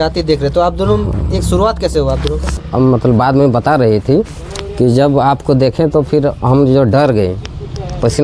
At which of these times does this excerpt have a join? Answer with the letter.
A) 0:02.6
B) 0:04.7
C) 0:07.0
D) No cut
A